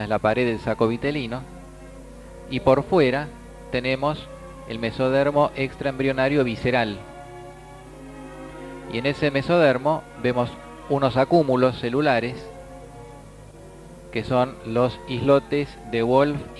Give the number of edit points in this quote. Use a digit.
1